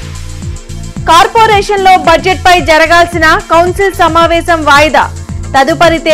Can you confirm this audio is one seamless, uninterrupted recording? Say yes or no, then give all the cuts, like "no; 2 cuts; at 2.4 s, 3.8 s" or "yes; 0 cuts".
yes; 0 cuts